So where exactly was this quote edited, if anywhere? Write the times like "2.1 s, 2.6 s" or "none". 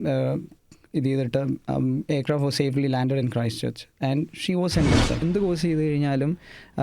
5.2 s